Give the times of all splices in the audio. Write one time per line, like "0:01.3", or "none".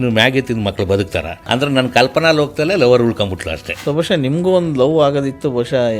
0:01.5
0:03.7